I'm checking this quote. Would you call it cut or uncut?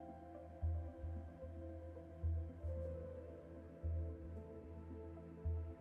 uncut